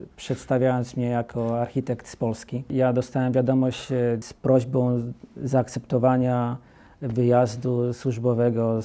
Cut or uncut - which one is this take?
cut